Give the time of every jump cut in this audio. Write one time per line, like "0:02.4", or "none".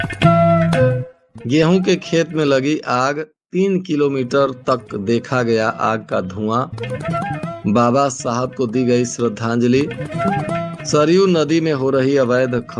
0:01.1